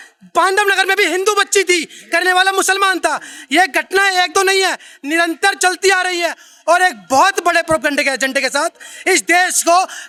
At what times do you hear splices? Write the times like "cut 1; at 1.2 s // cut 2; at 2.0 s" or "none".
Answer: none